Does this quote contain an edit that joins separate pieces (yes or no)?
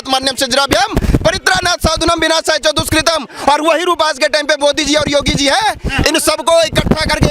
no